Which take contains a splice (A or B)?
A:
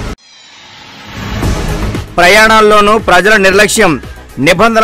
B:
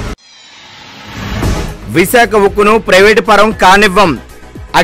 B